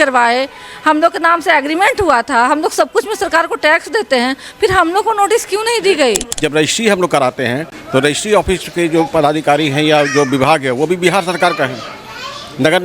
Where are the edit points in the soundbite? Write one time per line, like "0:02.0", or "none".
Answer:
0:06.3
0:07.7